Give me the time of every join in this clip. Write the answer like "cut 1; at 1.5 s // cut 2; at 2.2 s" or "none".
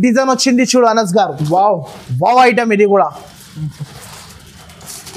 none

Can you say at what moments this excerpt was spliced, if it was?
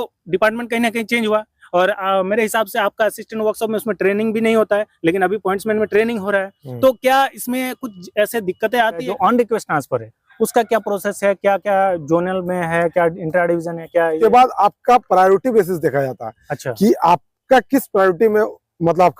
cut 1; at 9.1 s // cut 2; at 14.1 s

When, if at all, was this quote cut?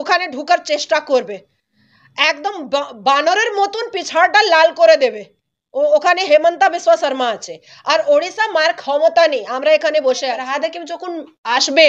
cut 1; at 10.3 s

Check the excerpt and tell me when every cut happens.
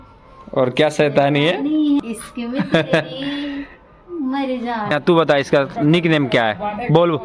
cut 1; at 2.0 s // cut 2; at 4.9 s

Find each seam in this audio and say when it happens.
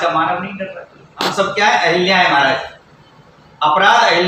cut 1; at 1.3 s

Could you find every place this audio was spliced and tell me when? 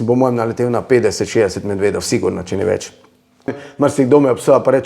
cut 1; at 3.6 s

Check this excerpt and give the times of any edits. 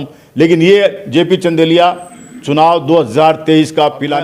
none

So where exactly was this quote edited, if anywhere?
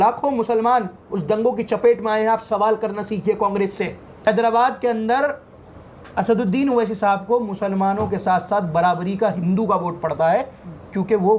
cut 1; at 4.3 s

